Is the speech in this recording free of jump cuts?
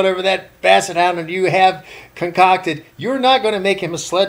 yes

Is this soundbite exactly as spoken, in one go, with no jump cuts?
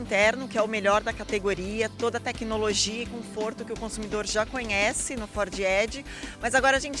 yes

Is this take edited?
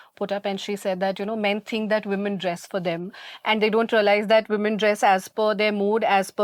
no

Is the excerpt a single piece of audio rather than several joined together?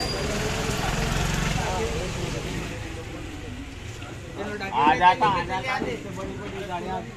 yes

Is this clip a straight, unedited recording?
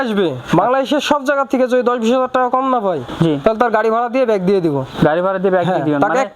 yes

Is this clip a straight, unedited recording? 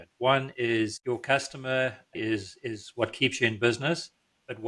no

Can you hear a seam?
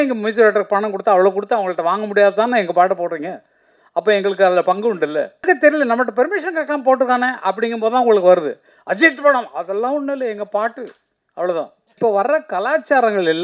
yes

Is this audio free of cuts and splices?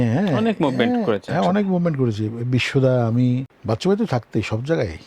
no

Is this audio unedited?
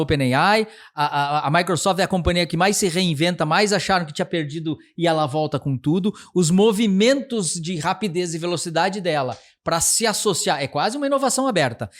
yes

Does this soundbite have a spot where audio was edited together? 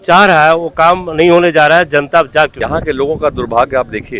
yes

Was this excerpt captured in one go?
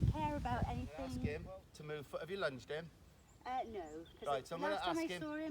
no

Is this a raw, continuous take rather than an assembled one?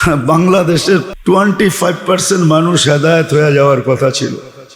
no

